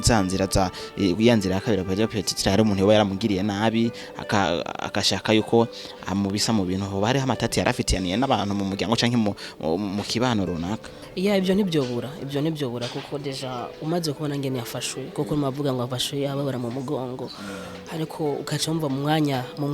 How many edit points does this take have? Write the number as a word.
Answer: one